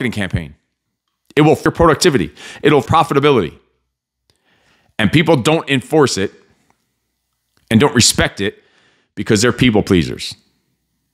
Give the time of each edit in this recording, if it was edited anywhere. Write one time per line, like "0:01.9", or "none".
0:01.6
0:02.9